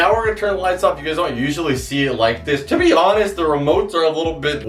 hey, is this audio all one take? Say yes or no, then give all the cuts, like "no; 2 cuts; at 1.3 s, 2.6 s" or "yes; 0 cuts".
yes; 0 cuts